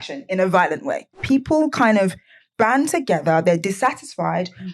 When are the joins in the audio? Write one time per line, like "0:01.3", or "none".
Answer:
0:01.2